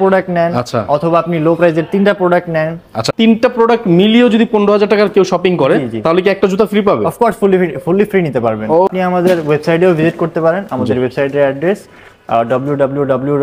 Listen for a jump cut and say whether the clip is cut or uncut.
cut